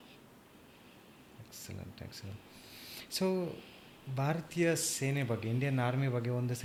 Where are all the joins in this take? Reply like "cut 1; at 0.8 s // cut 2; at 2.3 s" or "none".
none

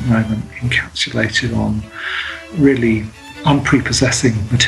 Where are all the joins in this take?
cut 1; at 3.2 s

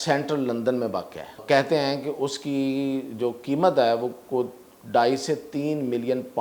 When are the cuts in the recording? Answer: cut 1; at 1.4 s

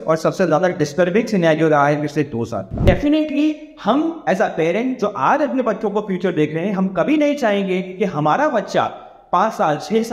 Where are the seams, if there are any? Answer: cut 1; at 2.6 s

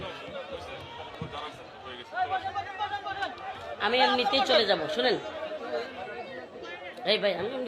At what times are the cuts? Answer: cut 1; at 1.1 s

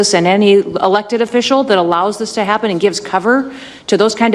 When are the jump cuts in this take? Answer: none

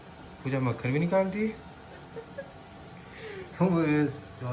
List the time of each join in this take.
cut 1; at 2.8 s

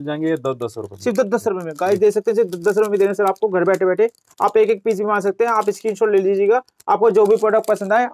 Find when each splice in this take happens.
none

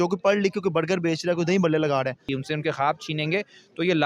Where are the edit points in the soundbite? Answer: cut 1; at 2.3 s

